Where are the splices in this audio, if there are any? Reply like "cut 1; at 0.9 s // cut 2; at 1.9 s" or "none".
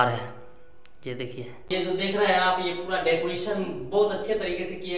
cut 1; at 1.7 s